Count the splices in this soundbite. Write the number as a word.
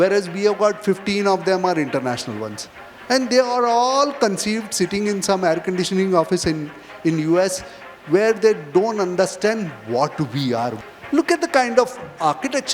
one